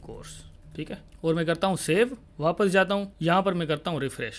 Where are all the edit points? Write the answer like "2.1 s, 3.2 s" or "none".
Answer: 1.1 s, 2.2 s, 3.1 s

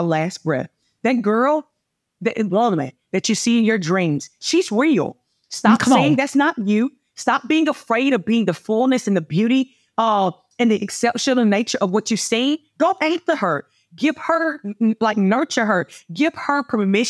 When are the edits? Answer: none

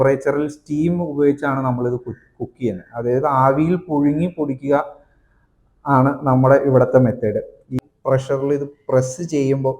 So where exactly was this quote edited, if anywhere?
7.7 s

